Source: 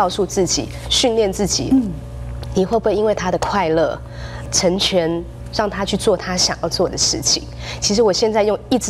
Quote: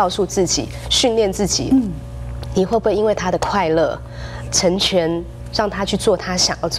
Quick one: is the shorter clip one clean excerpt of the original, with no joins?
yes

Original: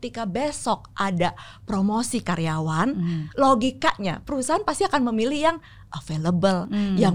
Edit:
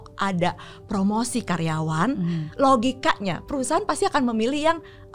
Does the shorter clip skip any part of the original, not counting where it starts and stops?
no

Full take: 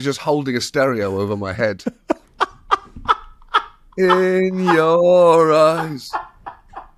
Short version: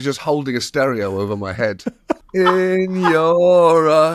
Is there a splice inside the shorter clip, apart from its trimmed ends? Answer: yes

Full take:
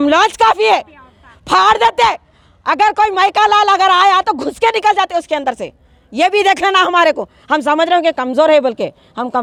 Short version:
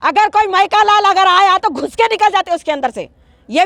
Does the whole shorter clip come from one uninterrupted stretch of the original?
yes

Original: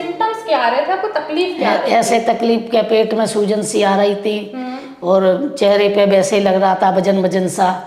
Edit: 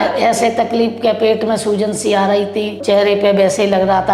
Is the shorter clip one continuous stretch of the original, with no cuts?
no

